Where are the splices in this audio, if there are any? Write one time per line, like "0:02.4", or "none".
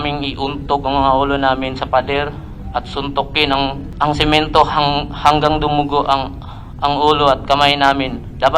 0:03.8